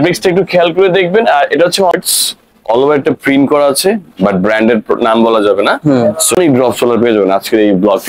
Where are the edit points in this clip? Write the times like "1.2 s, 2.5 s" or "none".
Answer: 1.9 s, 6.4 s